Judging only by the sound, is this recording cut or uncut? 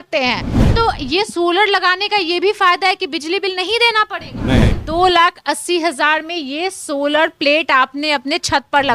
cut